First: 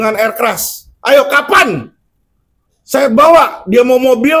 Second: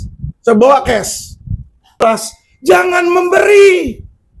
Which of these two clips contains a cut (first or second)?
second